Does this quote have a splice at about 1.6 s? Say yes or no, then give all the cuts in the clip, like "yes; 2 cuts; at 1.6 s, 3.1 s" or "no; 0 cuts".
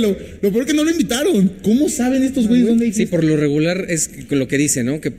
no; 1 cut; at 3.0 s